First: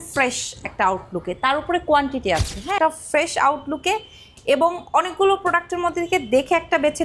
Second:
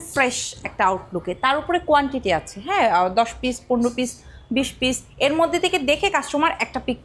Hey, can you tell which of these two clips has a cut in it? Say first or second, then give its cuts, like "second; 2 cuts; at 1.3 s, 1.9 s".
first; 1 cut; at 2.8 s